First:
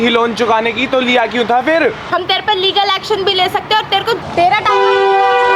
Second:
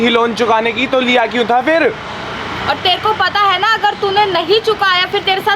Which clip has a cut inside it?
first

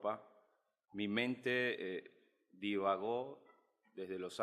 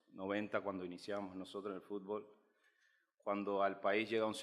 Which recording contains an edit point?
second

